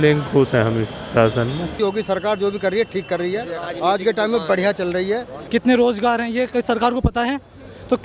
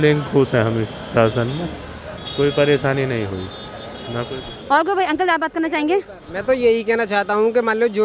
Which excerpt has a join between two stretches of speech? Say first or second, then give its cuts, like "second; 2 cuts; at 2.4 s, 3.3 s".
first; 2 cuts; at 1.8 s, 5.3 s